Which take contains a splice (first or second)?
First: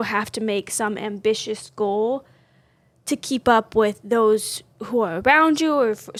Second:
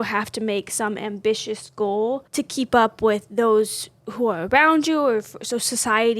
second